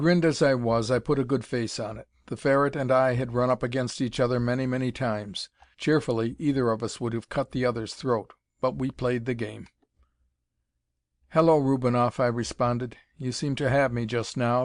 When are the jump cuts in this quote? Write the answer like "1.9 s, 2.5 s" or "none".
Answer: 10.1 s